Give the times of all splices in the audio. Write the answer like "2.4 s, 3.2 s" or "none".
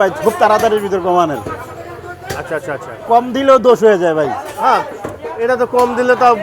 none